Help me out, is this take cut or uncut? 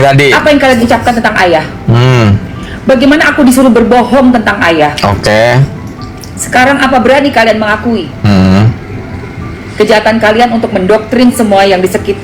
uncut